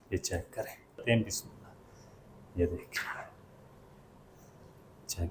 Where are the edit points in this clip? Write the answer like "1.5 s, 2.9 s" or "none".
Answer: 1.0 s